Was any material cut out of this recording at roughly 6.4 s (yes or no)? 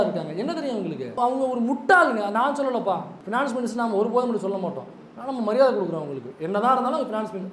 no